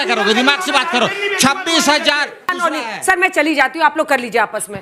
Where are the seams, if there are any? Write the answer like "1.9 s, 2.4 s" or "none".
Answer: 2.6 s